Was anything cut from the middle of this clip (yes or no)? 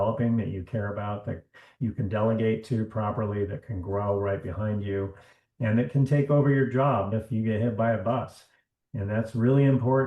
yes